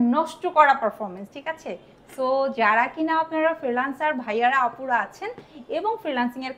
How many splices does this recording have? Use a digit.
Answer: 0